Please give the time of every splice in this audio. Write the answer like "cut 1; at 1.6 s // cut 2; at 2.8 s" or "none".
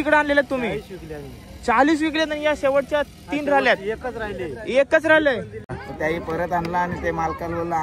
cut 1; at 5.8 s